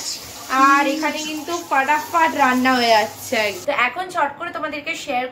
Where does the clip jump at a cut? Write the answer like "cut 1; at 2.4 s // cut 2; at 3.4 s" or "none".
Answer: cut 1; at 3.6 s